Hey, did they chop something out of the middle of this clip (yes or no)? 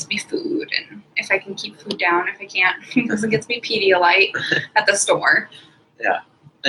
no